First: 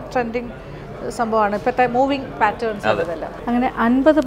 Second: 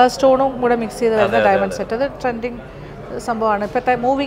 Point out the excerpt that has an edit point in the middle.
first; 1 cut; at 3.3 s

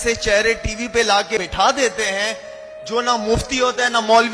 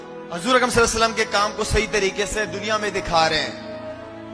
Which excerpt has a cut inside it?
first; 1 cut; at 1.4 s

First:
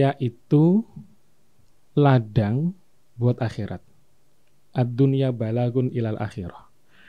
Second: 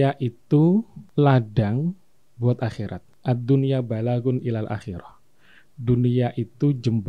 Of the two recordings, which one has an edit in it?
second; 2 cuts; at 1.0 s, 3.1 s

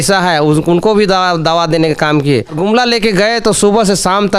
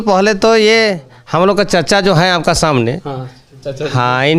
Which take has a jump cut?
first; 1 cut; at 2.6 s

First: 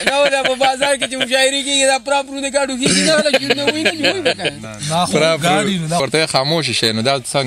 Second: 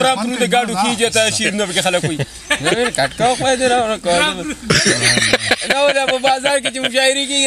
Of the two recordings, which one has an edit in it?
first; 1 cut; at 6.0 s

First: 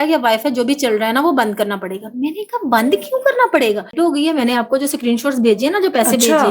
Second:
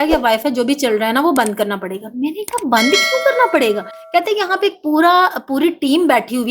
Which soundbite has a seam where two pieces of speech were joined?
first; 1 cut; at 3.9 s

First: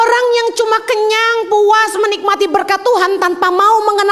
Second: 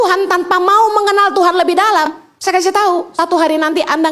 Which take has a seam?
second; 2 cuts; at 2.1 s, 3.1 s

